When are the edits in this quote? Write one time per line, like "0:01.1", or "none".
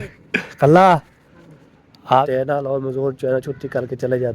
0:02.2